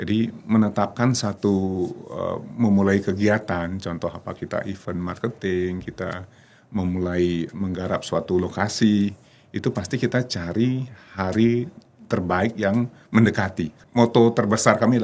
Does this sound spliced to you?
yes; 1 cut; at 13.7 s

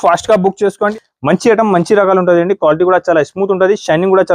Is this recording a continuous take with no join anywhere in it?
no; 1 cut; at 0.9 s

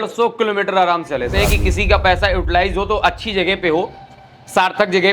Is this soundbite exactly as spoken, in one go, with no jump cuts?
no; 1 cut; at 1.4 s

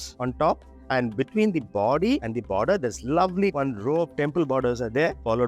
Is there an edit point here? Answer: yes; 1 cut; at 3.5 s

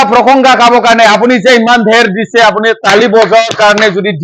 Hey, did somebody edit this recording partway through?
no; 0 cuts

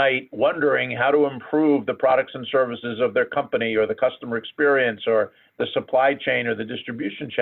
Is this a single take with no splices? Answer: yes; 0 cuts

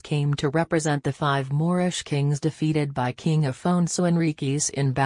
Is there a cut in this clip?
no; 0 cuts

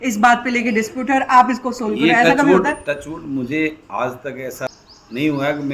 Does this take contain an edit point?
yes; 1 cut; at 4.7 s

